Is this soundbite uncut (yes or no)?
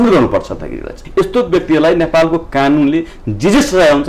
no